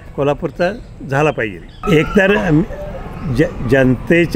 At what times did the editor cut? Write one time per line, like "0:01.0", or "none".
0:01.7